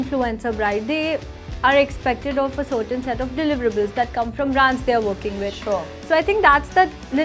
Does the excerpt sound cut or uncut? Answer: uncut